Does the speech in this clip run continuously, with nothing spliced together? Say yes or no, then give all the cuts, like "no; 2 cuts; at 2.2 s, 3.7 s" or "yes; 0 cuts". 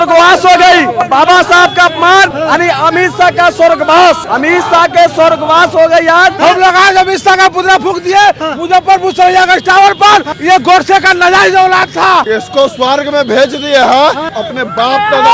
no; 7 cuts; at 1.0 s, 2.4 s, 4.2 s, 6.4 s, 10.3 s, 12.2 s, 14.4 s